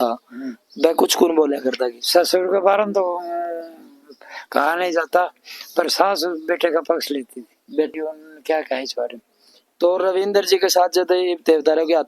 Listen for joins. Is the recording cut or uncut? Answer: cut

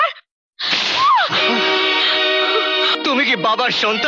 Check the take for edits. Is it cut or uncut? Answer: cut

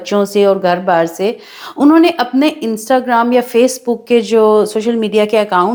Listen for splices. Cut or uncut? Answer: uncut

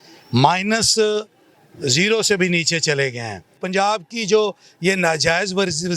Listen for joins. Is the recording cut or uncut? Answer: cut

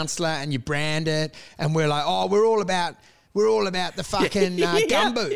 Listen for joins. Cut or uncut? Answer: uncut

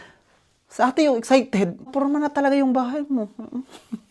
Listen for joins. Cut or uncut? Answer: cut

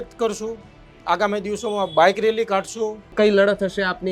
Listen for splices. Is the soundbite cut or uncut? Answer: cut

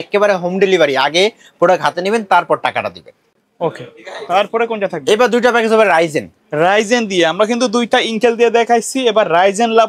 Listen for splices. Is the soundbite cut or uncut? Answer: uncut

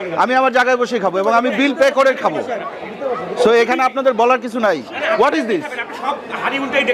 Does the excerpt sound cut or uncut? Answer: cut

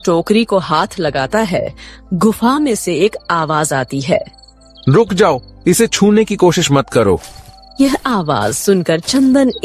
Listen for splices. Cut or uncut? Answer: uncut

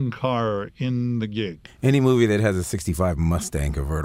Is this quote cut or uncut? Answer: cut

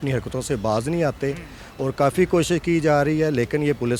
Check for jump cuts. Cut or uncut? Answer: uncut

